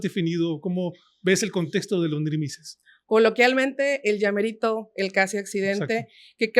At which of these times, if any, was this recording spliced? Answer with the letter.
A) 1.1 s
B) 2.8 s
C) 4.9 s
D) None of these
B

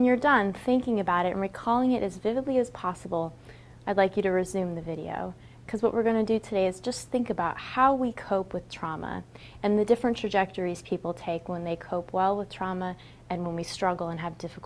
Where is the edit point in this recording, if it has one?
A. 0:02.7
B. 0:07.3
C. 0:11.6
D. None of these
A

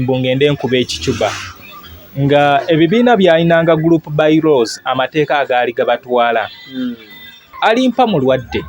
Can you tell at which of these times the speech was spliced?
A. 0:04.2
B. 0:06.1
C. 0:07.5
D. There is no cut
C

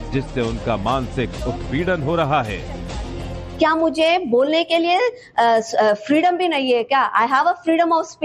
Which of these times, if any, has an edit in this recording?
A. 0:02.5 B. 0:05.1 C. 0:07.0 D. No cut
D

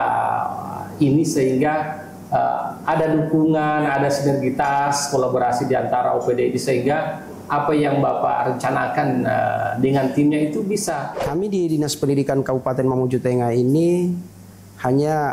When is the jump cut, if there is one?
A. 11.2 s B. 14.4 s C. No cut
A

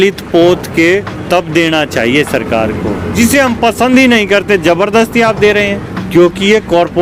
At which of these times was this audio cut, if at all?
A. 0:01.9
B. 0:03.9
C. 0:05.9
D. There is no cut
C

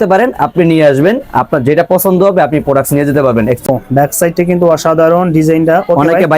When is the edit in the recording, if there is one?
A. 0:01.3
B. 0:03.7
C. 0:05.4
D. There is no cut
B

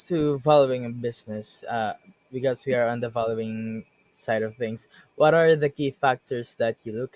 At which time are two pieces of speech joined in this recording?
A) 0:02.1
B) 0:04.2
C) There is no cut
C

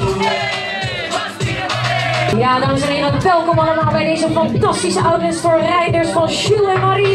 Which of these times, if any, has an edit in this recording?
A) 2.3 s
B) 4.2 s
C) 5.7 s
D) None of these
A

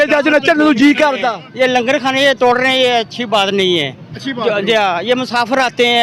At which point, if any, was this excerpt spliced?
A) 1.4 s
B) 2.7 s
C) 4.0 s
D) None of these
A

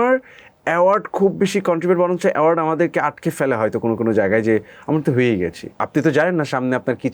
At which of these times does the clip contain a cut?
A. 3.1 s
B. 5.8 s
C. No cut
B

